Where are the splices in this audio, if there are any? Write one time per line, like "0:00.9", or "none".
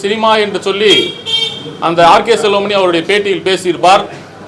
none